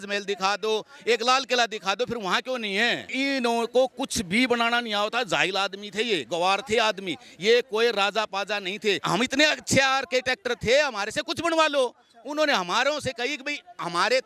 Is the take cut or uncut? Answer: cut